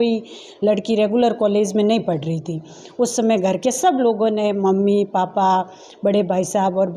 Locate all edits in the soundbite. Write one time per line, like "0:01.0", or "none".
none